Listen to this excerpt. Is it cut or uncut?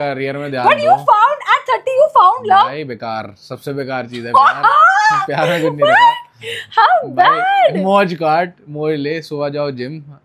uncut